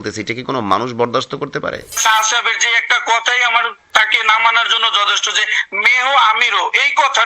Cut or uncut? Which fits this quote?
cut